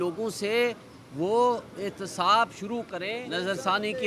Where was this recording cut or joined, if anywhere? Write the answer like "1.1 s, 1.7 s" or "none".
3.0 s